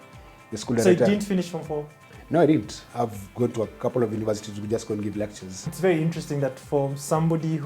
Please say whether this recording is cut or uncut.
cut